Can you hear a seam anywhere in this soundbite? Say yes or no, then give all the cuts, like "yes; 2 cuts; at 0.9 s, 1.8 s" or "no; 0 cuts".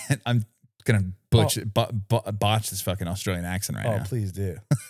no; 0 cuts